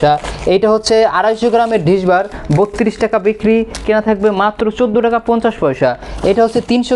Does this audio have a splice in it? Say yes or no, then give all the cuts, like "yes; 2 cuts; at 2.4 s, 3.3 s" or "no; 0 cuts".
no; 0 cuts